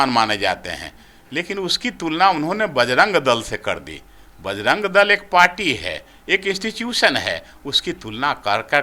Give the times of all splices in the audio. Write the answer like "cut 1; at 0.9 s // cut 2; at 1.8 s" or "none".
none